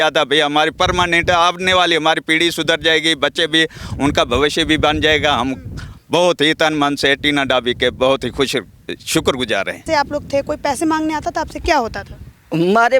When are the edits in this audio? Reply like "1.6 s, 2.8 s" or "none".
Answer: 9.8 s